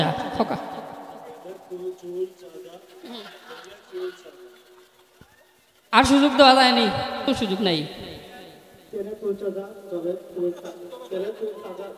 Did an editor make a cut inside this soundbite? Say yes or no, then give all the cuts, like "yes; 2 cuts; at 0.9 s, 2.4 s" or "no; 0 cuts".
yes; 1 cut; at 7.3 s